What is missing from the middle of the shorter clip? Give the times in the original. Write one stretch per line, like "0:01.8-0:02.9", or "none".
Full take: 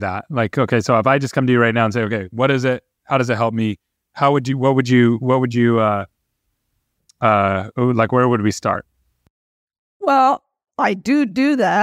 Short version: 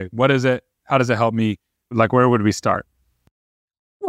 0:04.1-0:07.9